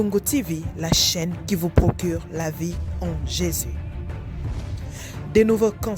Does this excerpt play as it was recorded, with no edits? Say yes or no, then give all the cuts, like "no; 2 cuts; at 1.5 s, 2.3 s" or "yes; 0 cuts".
yes; 0 cuts